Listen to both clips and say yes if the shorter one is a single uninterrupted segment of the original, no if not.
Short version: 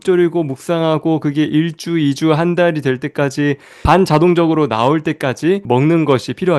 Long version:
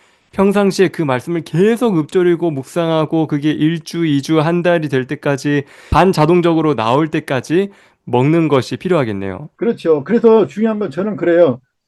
no